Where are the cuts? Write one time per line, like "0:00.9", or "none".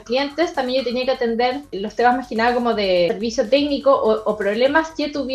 0:01.8
0:03.1